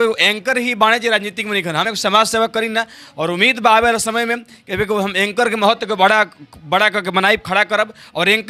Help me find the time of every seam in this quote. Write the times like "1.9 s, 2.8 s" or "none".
none